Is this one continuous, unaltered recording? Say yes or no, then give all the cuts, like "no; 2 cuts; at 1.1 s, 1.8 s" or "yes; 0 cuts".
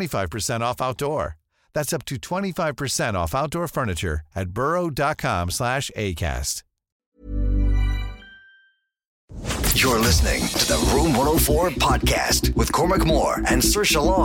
no; 1 cut; at 9.4 s